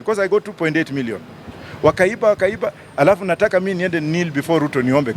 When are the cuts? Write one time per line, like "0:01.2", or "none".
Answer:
none